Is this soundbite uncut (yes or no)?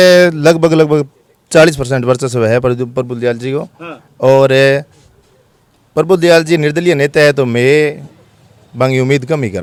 yes